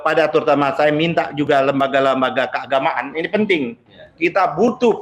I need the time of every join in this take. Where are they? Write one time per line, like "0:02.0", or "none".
none